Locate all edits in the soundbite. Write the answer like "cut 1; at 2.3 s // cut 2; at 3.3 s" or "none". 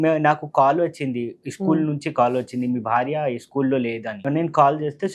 cut 1; at 4.2 s

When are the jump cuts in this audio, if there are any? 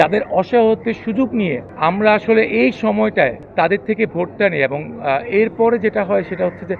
cut 1; at 1.7 s // cut 2; at 3.4 s

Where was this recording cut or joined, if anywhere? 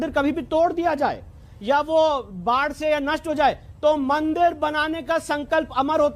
none

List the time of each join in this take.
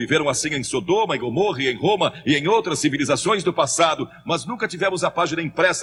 none

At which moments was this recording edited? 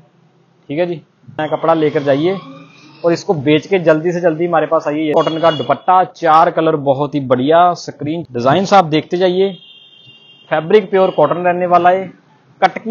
cut 1; at 1.4 s // cut 2; at 5.1 s // cut 3; at 8.2 s

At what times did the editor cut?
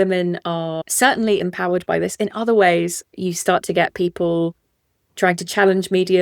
cut 1; at 1.4 s // cut 2; at 3.1 s

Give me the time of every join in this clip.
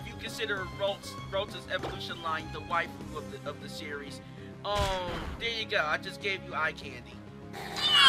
cut 1; at 7.2 s

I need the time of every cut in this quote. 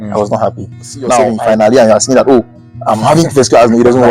cut 1; at 1.4 s

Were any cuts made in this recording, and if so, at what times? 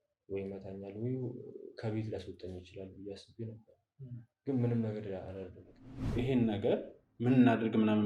cut 1; at 6.0 s

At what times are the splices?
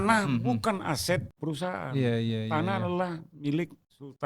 cut 1; at 1.3 s

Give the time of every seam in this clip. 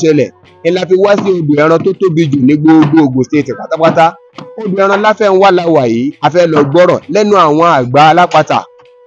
none

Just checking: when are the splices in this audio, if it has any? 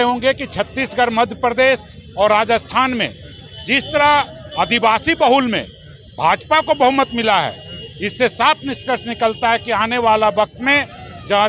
none

